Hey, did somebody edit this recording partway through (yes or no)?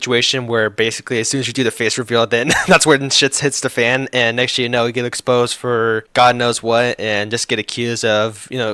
yes